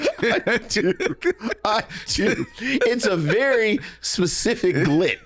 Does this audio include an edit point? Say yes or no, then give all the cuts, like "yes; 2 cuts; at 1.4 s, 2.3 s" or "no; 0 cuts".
no; 0 cuts